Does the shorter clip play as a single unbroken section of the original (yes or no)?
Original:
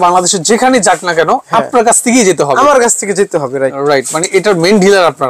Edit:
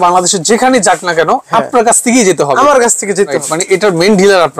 no